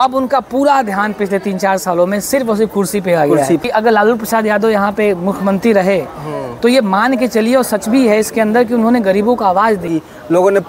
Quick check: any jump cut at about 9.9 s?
yes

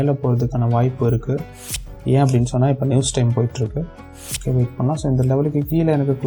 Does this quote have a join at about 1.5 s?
yes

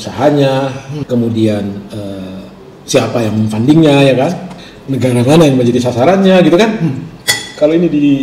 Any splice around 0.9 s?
yes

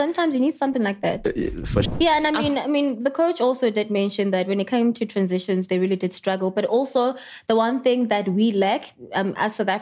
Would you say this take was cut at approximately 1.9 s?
yes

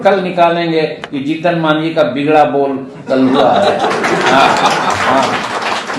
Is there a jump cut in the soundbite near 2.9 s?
no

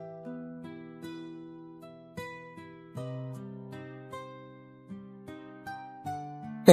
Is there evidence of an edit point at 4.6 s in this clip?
no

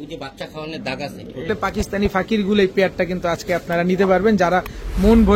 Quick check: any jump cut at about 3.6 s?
no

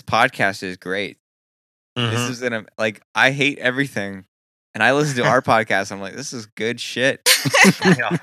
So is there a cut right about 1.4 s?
no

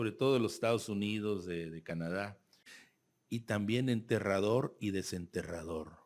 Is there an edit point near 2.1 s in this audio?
yes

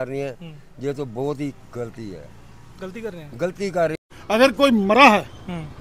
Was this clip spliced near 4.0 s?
yes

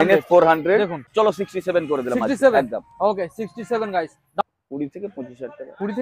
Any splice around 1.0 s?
yes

